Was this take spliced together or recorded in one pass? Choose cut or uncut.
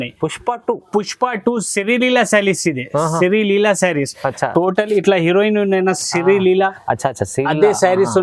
uncut